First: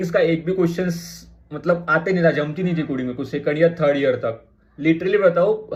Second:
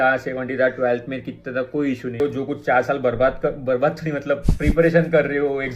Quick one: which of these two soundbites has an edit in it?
second; 1 cut; at 2.2 s

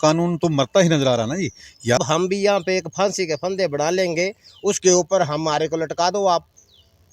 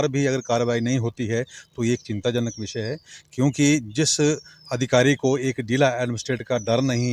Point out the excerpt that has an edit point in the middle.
first; 1 cut; at 2.0 s

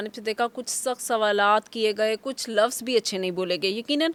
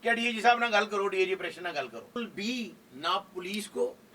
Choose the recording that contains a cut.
second; 1 cut; at 2.2 s

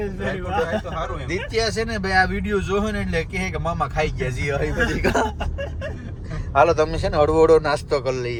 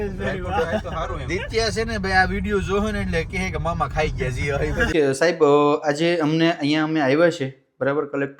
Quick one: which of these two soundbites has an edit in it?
second; 1 cut; at 4.9 s

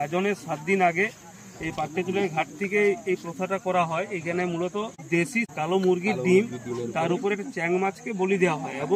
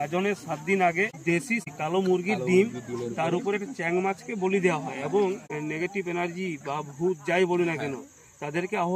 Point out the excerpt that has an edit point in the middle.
second; 2 cuts; at 1.7 s, 5.4 s

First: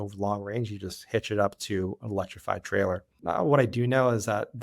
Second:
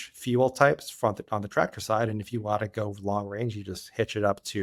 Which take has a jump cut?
first; 1 cut; at 3.2 s

